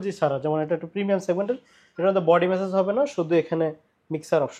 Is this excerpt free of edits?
yes; 0 cuts

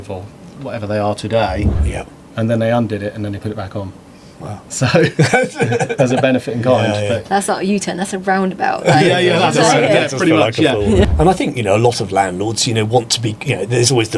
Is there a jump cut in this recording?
yes; 2 cuts; at 1.7 s, 11.0 s

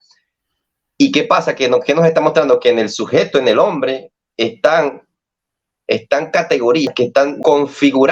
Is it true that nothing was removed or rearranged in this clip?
no; 1 cut; at 6.9 s

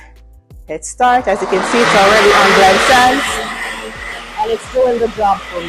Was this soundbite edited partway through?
no; 0 cuts

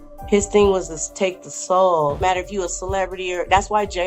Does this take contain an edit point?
yes; 1 cut; at 2.2 s

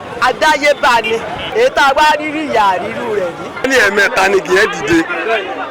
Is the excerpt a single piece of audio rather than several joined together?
no; 2 cuts; at 1.4 s, 3.7 s

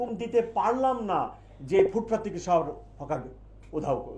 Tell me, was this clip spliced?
no; 0 cuts

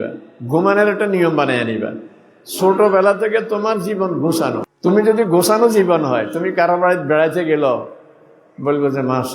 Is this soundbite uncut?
no; 1 cut; at 4.6 s

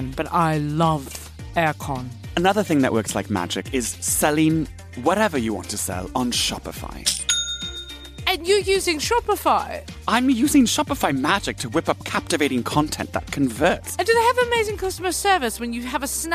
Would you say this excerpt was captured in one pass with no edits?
no; 3 cuts; at 2.2 s, 8.1 s, 13.9 s

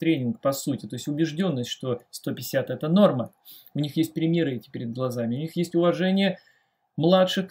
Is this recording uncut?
yes; 0 cuts

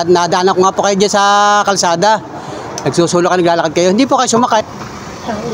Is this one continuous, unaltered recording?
no; 1 cut; at 4.6 s

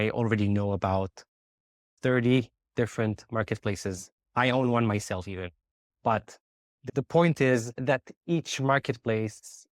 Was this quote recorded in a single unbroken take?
no; 1 cut; at 1.9 s

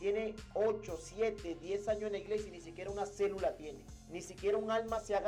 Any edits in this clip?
no; 0 cuts

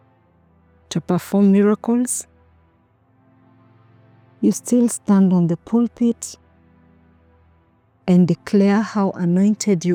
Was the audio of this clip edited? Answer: no; 0 cuts

